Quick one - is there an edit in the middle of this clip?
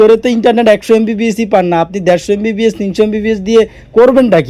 no; 0 cuts

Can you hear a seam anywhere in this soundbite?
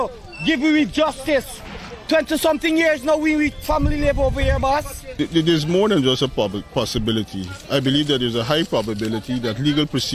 yes; 1 cut; at 5.0 s

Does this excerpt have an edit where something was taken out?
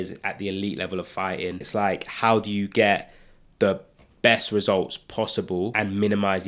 yes; 2 cuts; at 1.7 s, 5.7 s

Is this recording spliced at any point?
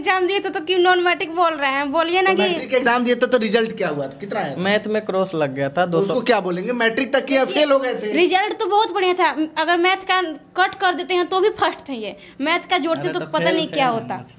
no; 0 cuts

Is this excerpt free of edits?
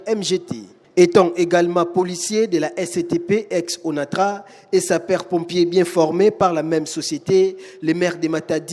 yes; 0 cuts

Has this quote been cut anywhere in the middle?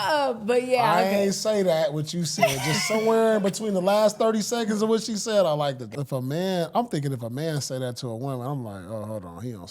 yes; 1 cut; at 5.9 s

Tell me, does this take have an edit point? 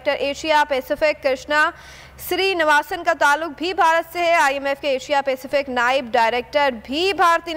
no; 0 cuts

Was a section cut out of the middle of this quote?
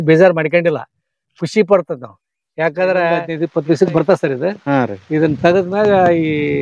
yes; 1 cut; at 3.3 s

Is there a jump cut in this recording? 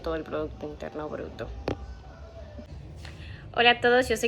yes; 1 cut; at 2.7 s

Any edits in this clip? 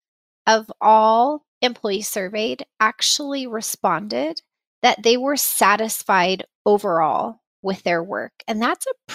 yes; 1 cut; at 1.5 s

